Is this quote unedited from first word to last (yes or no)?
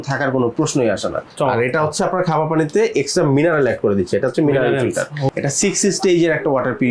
no